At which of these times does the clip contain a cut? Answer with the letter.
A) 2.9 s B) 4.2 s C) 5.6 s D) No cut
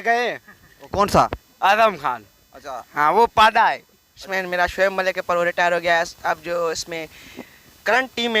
B